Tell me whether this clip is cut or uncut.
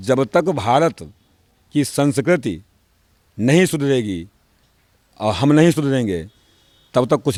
uncut